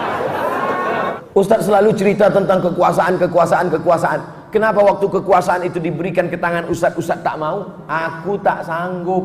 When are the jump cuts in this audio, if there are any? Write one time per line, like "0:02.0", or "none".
0:01.2